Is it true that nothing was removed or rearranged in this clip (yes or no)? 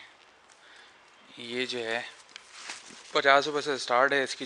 yes